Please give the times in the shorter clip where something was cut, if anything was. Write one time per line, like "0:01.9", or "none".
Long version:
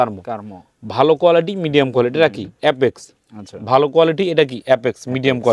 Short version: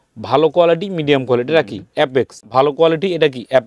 0:02.4